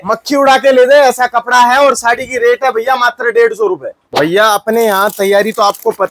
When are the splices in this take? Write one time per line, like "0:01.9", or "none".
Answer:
0:04.0